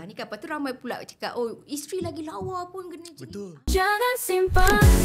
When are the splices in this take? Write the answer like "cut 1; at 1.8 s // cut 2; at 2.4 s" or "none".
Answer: cut 1; at 3.6 s